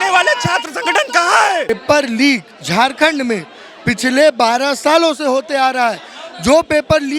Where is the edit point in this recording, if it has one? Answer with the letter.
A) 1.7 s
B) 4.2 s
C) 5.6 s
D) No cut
A